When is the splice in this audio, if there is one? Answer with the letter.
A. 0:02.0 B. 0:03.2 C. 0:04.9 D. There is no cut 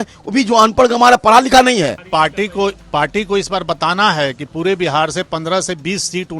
A